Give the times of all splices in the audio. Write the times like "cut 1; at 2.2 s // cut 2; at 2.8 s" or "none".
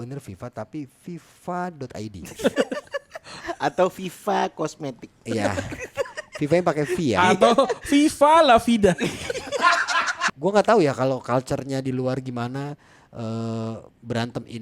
cut 1; at 10.2 s